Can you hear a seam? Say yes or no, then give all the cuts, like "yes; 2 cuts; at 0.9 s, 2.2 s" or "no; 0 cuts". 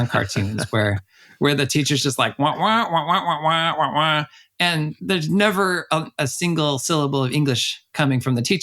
no; 0 cuts